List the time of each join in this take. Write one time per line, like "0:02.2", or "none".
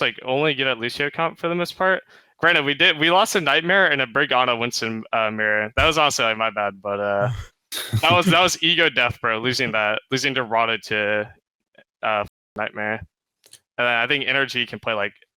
none